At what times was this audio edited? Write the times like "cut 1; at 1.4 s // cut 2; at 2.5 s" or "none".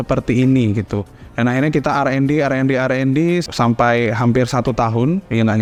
none